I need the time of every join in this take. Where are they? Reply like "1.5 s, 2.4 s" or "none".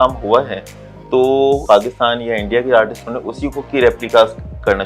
1.6 s